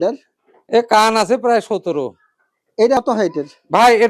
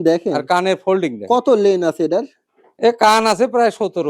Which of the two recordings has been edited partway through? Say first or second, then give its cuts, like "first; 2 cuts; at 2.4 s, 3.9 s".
first; 1 cut; at 3.0 s